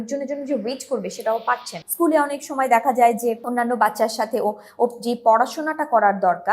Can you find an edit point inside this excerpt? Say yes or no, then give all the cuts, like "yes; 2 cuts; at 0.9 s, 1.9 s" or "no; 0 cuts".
yes; 1 cut; at 1.8 s